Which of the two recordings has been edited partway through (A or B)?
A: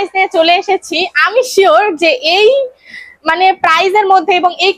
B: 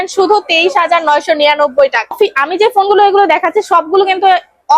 B